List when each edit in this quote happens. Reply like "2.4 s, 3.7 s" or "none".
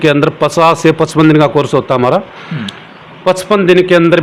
none

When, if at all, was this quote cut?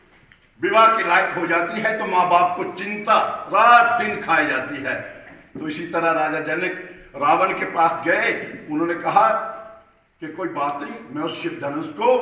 none

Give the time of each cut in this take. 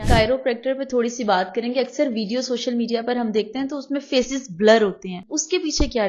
5.1 s

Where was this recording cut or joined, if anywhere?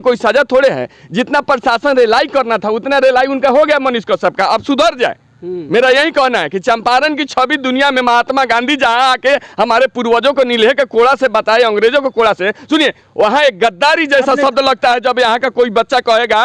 none

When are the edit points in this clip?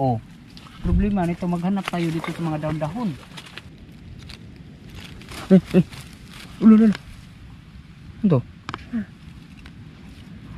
3.7 s

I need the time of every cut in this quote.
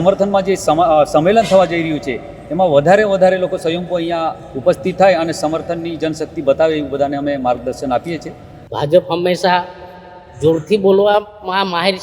8.7 s

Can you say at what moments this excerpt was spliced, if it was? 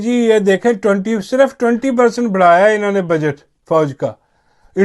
none

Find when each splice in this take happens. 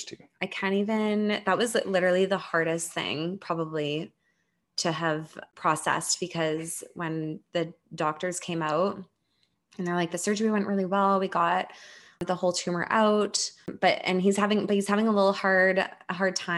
5.5 s, 12.2 s, 13.7 s

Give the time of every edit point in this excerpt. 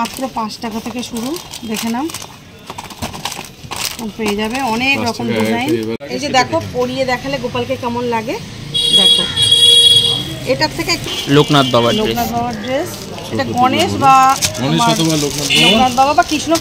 6.1 s, 11.0 s

